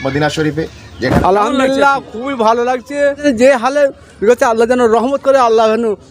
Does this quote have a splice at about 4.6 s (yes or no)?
no